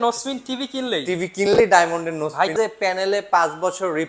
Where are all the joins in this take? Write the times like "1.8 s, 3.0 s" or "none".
2.5 s